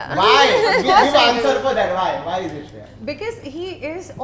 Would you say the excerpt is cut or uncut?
uncut